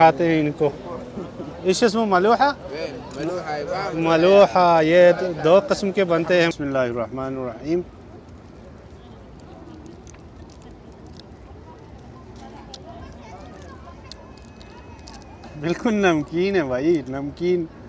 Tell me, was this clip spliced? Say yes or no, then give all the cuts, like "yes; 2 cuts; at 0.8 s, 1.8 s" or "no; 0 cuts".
yes; 1 cut; at 6.5 s